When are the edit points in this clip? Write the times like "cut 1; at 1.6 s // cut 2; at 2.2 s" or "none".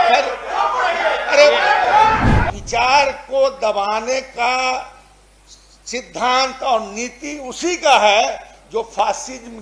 cut 1; at 2.5 s